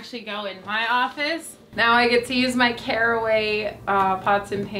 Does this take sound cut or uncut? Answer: cut